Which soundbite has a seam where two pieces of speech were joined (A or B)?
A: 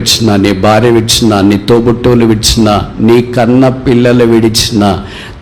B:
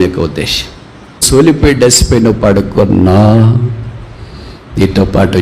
B